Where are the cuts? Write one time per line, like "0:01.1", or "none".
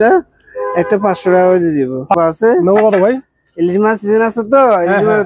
0:02.1